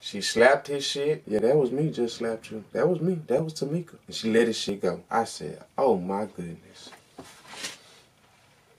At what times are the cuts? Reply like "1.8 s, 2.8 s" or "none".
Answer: 1.2 s, 4.6 s, 7.0 s